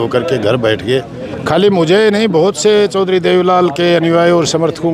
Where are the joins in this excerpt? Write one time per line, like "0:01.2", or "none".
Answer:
0:01.3